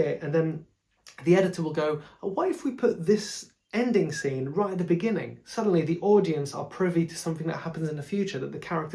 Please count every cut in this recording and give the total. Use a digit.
0